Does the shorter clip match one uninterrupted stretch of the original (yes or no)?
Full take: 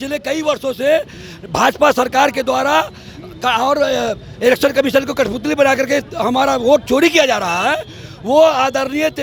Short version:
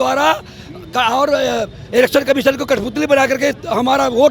yes